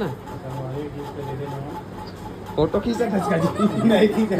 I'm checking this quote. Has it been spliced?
no; 0 cuts

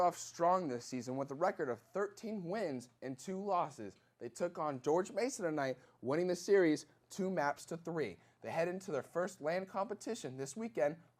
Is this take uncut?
yes; 0 cuts

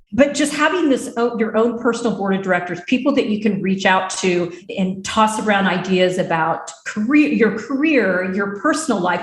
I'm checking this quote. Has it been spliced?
yes; 1 cut; at 4.6 s

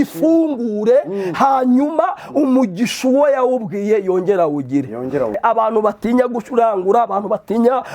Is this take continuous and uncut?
no; 1 cut; at 5.4 s

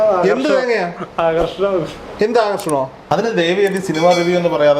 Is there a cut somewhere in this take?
yes; 1 cut; at 3.1 s

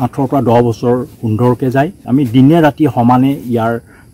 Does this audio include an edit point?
yes; 1 cut; at 2.0 s

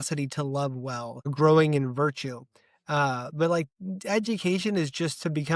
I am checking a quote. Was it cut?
yes; 1 cut; at 1.3 s

